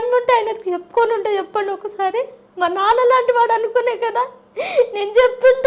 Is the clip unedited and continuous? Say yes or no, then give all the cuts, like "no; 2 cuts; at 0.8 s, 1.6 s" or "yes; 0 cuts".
yes; 0 cuts